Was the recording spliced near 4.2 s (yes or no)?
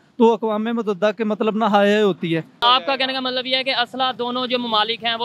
no